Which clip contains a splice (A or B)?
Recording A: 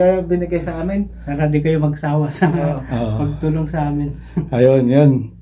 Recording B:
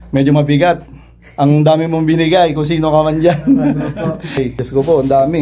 B